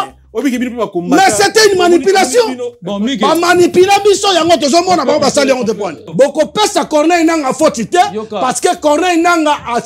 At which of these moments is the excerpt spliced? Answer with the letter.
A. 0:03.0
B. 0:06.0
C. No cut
B